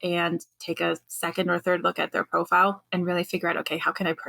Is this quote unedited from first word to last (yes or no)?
no